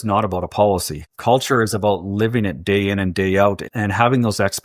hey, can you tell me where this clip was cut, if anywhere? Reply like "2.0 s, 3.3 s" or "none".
1.3 s, 3.6 s